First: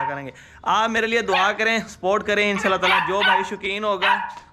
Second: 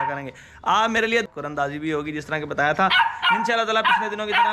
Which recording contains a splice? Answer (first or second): second